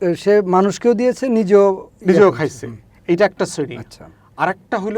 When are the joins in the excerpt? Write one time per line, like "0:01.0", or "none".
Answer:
none